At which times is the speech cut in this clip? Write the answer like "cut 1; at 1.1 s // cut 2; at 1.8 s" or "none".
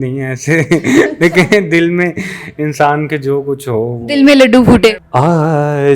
cut 1; at 5.0 s